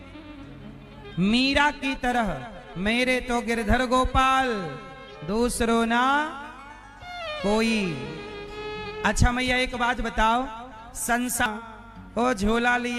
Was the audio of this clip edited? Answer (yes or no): yes